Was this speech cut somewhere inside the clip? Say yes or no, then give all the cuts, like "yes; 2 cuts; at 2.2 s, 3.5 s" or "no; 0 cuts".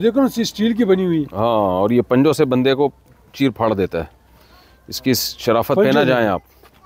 no; 0 cuts